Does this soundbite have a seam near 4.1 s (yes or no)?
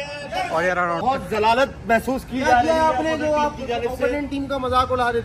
no